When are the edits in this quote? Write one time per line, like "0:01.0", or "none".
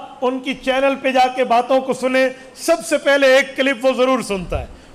none